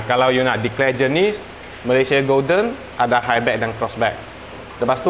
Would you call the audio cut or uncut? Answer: uncut